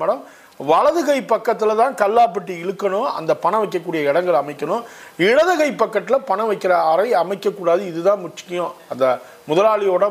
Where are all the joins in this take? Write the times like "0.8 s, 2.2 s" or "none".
none